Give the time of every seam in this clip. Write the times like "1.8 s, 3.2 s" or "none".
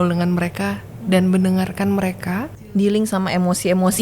2.7 s